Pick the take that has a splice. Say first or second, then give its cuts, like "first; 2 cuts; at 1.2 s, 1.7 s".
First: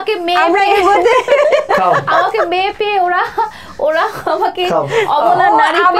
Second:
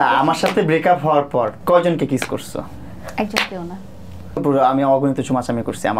second; 2 cuts; at 1.6 s, 4.4 s